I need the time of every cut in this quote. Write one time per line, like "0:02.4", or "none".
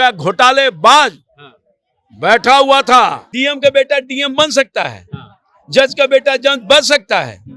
0:03.3